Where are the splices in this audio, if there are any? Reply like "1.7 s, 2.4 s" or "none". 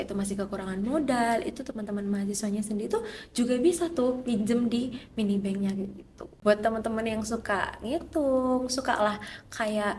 6.3 s